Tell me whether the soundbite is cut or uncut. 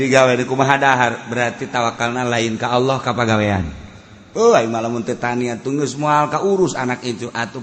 uncut